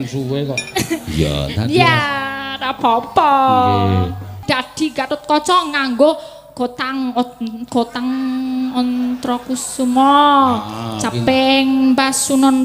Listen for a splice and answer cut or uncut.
cut